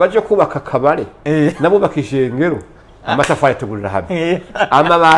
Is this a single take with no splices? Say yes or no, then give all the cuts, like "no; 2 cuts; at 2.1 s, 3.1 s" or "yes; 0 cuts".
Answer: yes; 0 cuts